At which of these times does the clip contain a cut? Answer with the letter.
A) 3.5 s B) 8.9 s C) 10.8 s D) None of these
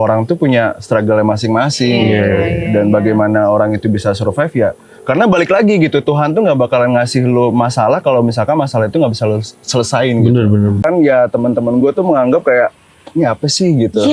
C